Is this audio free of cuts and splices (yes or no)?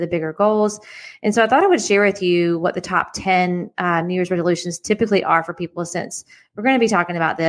yes